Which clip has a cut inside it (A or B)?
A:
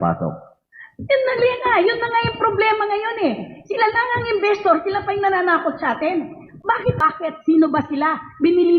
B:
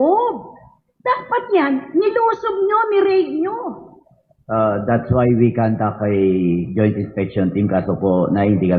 A